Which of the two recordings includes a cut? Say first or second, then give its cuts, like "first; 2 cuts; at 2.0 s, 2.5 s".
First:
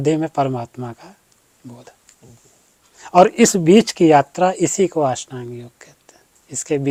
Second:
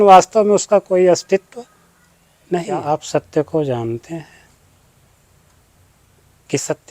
second; 1 cut; at 2.8 s